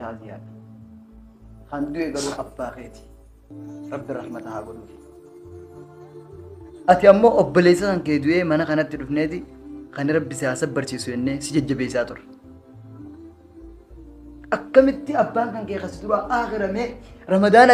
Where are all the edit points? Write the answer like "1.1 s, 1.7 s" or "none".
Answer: none